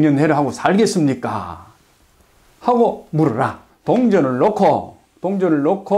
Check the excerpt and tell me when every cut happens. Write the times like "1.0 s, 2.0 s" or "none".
3.7 s